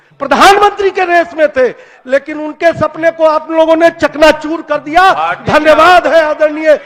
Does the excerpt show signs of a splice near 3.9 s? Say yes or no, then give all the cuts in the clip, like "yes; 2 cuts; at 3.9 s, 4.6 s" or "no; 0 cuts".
no; 0 cuts